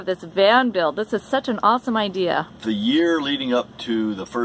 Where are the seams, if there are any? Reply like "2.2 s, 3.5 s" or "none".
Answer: 2.5 s